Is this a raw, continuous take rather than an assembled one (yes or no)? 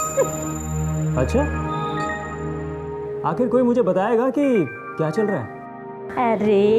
yes